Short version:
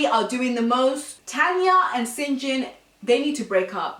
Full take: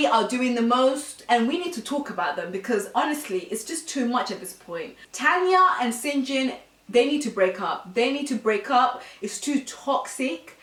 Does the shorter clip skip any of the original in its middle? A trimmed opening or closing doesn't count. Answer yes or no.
yes